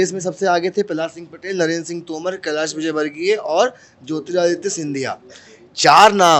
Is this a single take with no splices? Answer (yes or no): yes